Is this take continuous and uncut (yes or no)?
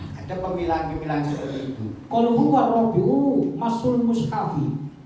no